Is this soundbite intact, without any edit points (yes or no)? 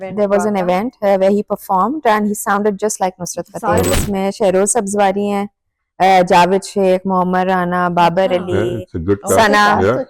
no